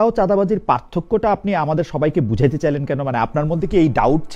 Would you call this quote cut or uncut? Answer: uncut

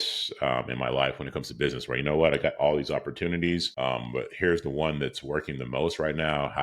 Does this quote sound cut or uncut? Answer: cut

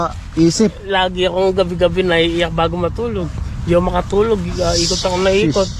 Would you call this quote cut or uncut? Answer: uncut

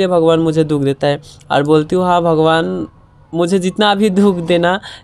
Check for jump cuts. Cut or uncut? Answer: uncut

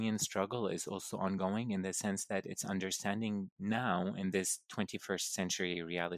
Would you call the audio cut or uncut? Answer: uncut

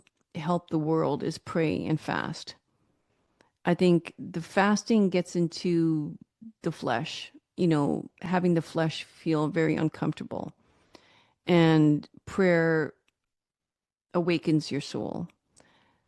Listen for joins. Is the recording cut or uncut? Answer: uncut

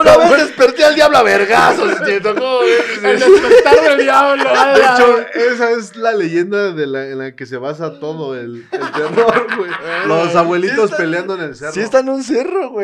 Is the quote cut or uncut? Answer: uncut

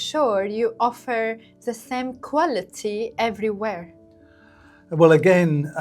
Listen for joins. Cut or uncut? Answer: uncut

